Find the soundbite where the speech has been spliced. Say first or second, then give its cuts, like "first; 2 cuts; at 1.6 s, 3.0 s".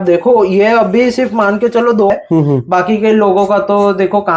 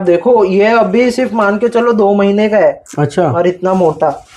first; 1 cut; at 2.1 s